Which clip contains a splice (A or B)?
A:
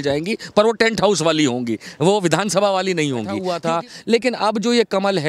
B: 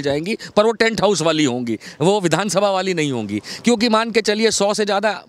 A